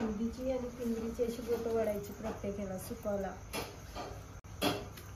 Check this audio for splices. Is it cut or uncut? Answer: uncut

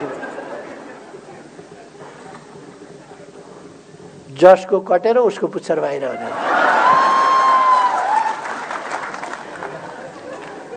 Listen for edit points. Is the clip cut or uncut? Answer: uncut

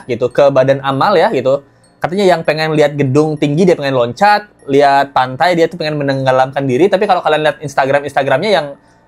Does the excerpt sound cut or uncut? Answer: uncut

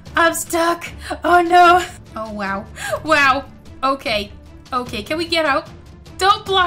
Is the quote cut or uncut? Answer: uncut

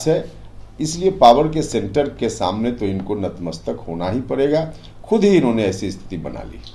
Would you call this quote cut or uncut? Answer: uncut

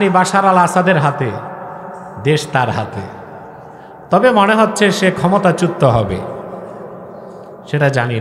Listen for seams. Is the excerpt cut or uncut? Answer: uncut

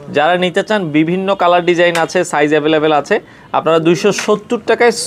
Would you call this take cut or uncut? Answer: uncut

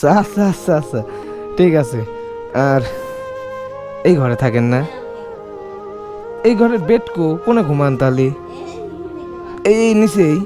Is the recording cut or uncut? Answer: cut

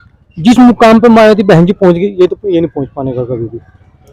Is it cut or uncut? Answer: uncut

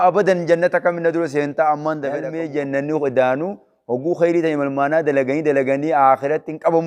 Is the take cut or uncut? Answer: cut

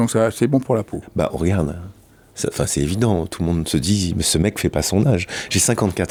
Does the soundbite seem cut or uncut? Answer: uncut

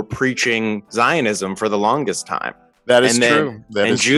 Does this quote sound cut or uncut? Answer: uncut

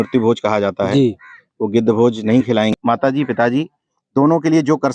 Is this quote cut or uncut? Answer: cut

